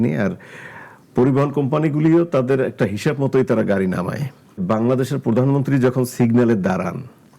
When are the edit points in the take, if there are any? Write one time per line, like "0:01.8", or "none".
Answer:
0:04.6